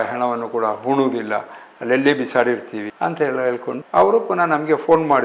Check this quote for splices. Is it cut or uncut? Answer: cut